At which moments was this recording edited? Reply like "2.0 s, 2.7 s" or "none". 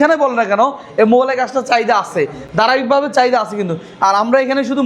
none